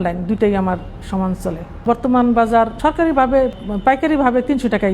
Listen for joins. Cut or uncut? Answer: cut